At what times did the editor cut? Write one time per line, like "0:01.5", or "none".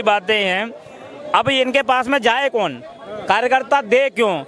none